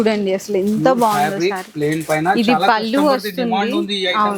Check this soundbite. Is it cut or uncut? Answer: uncut